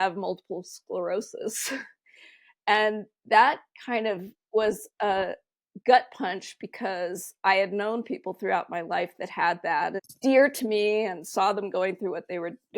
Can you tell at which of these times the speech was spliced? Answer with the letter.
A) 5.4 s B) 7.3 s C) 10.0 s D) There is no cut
C